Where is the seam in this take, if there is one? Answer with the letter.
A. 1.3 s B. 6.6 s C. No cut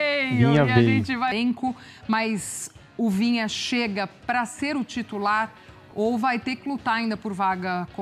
A